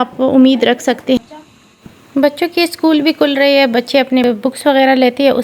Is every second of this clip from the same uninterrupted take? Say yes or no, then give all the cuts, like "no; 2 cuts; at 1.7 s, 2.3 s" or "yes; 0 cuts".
no; 2 cuts; at 1.2 s, 4.2 s